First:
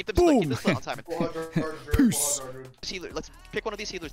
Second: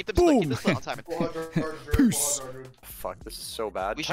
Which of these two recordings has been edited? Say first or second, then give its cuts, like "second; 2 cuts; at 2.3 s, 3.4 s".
first; 1 cut; at 2.9 s